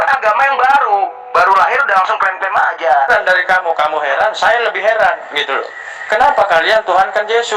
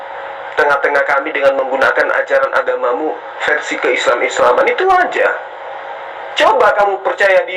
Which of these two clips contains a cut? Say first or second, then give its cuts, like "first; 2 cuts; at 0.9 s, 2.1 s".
first; 1 cut; at 3.1 s